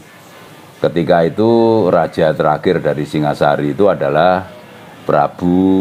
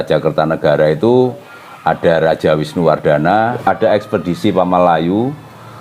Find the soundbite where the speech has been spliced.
second; 1 cut; at 3.6 s

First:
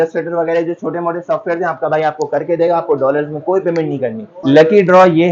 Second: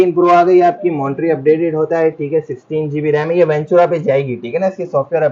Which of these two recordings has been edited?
first; 1 cut; at 4.4 s

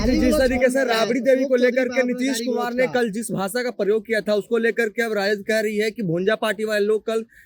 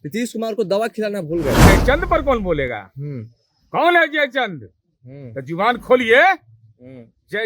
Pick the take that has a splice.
second; 1 cut; at 1.6 s

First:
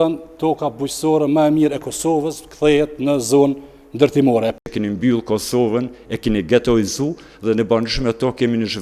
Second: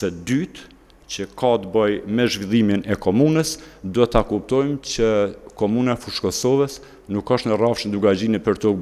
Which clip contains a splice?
first; 1 cut; at 4.6 s

